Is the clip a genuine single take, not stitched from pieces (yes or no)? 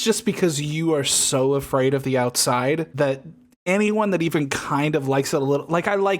no